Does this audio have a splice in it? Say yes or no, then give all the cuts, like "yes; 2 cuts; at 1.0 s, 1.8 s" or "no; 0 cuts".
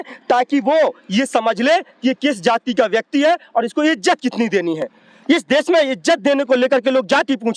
no; 0 cuts